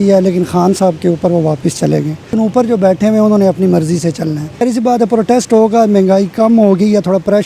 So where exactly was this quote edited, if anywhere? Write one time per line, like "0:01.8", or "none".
0:02.3
0:04.6